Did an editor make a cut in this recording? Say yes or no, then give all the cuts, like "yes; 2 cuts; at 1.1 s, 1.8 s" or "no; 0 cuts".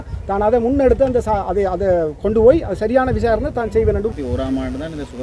yes; 1 cut; at 4.1 s